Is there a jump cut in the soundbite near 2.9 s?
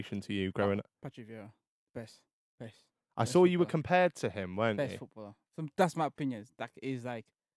no; 0 cuts

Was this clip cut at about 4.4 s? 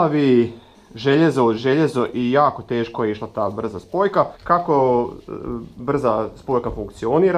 yes; 1 cut; at 4.4 s

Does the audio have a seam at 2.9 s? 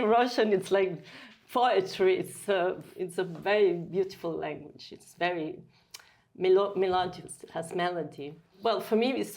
yes; 2 cuts; at 2.9 s, 8.5 s

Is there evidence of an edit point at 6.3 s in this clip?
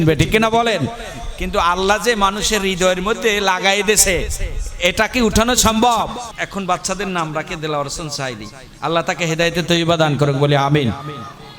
yes; 1 cut; at 6.3 s

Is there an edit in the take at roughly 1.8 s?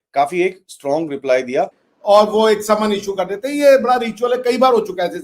yes; 1 cut; at 1.8 s

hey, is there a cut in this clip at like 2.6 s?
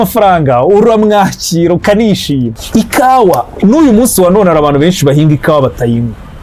yes; 1 cut; at 2.6 s

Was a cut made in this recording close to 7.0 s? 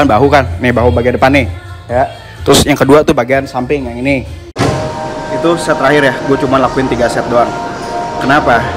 no; 1 cut; at 4.5 s

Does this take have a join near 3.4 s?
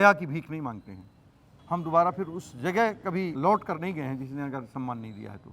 yes; 2 cuts; at 1.6 s, 3.4 s

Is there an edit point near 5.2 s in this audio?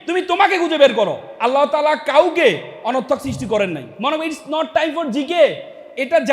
no; 2 cuts; at 1.3 s, 3.9 s

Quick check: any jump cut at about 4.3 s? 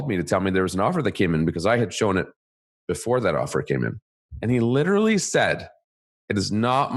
yes; 1 cut; at 4.3 s

